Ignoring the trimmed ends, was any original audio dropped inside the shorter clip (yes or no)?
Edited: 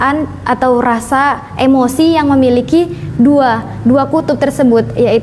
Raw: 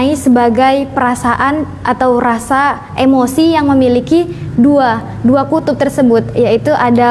no